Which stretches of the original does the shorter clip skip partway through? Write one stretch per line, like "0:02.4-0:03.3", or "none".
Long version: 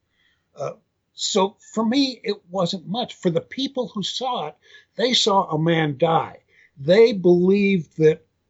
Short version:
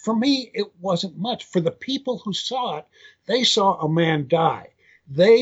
none